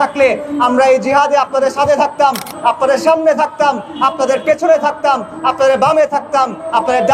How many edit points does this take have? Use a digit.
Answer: 0